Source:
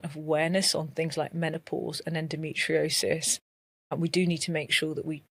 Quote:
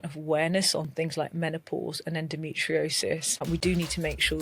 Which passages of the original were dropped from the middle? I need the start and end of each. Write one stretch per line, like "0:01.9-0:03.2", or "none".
0:03.3-0:03.8